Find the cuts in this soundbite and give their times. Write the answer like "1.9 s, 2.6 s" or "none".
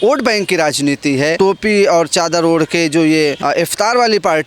1.3 s, 3.4 s